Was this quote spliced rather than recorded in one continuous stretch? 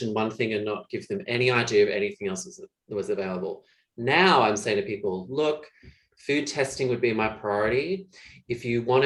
no; 0 cuts

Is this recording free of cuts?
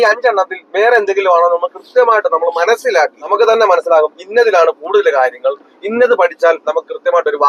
no; 1 cut; at 3.2 s

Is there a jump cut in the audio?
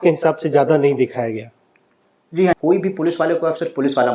yes; 1 cut; at 2.5 s

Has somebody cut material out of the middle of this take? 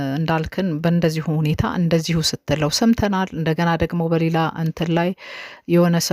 yes; 1 cut; at 3.6 s

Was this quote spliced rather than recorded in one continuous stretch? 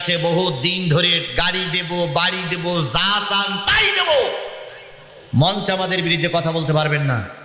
no; 0 cuts

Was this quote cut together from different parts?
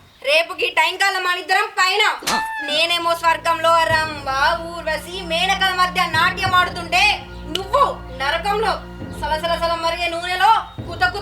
no; 0 cuts

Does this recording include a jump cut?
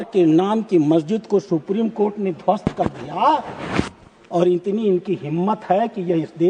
no; 0 cuts

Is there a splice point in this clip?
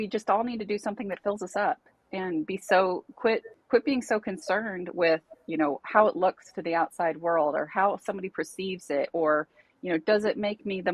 no; 0 cuts

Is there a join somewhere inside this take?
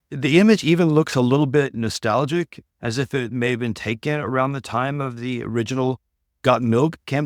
no; 0 cuts

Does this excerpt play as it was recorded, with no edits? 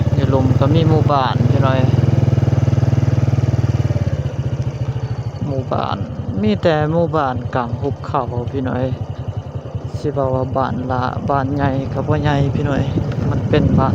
yes; 0 cuts

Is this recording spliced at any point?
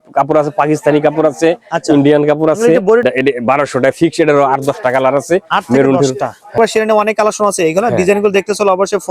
yes; 2 cuts; at 3.0 s, 6.6 s

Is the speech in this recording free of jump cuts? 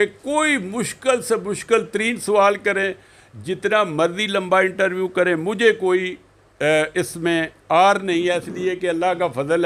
yes; 0 cuts

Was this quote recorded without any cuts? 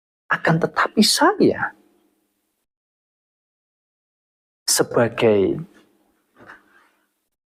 yes; 0 cuts

